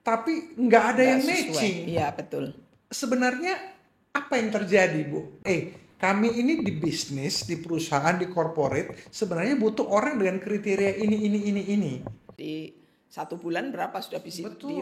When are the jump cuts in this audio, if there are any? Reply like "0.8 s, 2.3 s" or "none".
5.4 s, 12.3 s